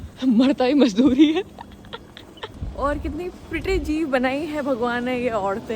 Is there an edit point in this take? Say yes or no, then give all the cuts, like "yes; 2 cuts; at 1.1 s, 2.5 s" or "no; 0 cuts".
no; 0 cuts